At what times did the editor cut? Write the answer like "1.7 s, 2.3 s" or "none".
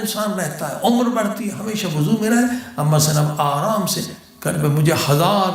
none